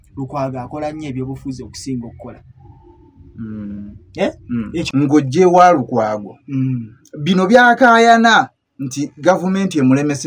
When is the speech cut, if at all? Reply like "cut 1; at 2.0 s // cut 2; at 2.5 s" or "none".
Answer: cut 1; at 4.9 s